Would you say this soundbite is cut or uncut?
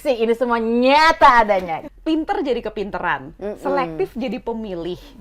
cut